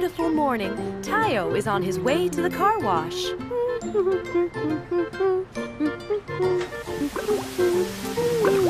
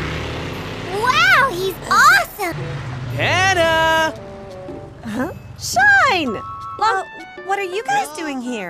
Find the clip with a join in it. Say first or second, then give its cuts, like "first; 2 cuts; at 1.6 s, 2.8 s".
second; 2 cuts; at 2.5 s, 6.9 s